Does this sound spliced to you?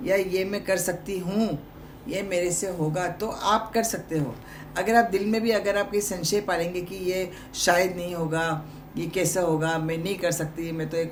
no; 0 cuts

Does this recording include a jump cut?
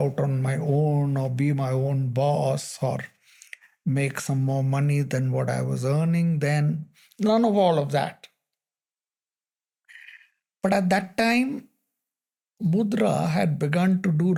no; 0 cuts

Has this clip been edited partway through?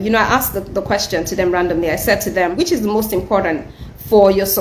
yes; 1 cut; at 2.5 s

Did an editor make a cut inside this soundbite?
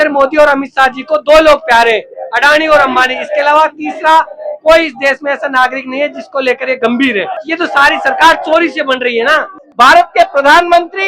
yes; 2 cuts; at 7.4 s, 9.6 s

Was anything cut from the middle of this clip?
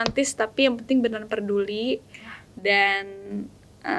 no; 0 cuts

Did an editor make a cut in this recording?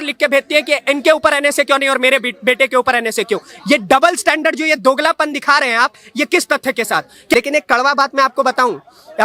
yes; 1 cut; at 7.3 s

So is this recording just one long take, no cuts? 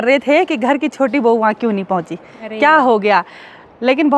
yes; 0 cuts

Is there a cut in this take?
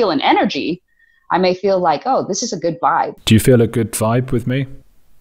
yes; 1 cut; at 3.2 s

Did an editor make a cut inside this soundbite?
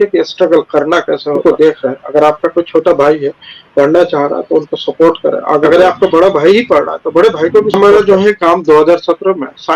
yes; 3 cuts; at 1.4 s, 5.7 s, 7.8 s

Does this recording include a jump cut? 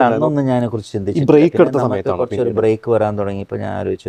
no; 0 cuts

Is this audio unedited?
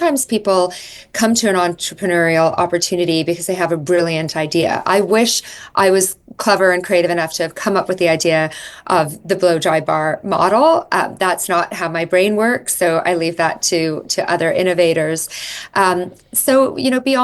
yes; 0 cuts

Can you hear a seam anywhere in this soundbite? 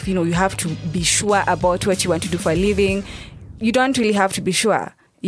no; 0 cuts

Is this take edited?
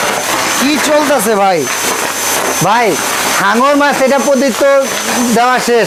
no; 0 cuts

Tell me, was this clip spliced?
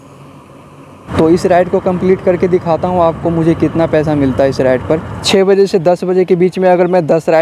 yes; 2 cuts; at 1.1 s, 5.2 s

